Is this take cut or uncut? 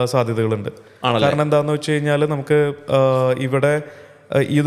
uncut